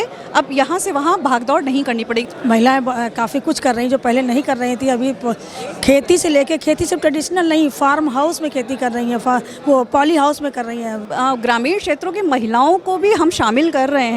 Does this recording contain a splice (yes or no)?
yes